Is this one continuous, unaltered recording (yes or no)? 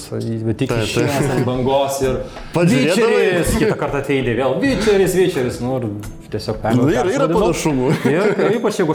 yes